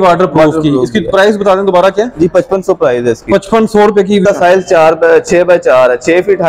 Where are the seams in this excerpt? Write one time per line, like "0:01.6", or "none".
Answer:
0:04.2